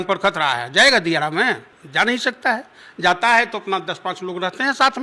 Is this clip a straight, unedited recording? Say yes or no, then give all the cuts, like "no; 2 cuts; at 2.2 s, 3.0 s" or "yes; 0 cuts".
yes; 0 cuts